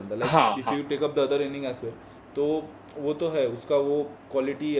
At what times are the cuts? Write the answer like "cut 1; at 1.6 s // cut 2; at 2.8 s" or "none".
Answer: none

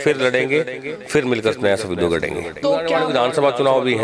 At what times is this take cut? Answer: cut 1; at 2.9 s

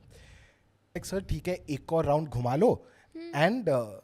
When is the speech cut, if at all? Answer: cut 1; at 1.0 s

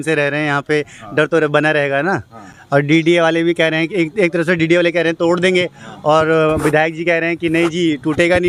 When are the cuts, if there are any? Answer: none

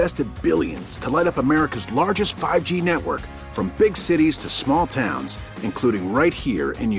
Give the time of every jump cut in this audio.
none

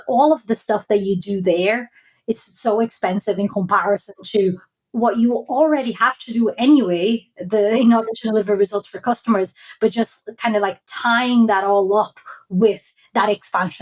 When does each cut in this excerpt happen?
none

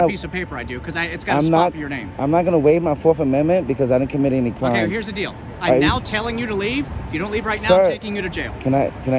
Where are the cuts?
cut 1; at 4.9 s

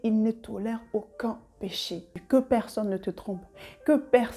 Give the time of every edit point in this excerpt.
cut 1; at 2.2 s

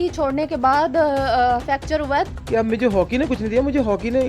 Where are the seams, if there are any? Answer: cut 1; at 2.3 s

